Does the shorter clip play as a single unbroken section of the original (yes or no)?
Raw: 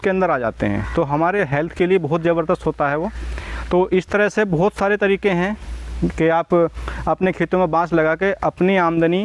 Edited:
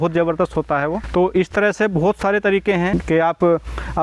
no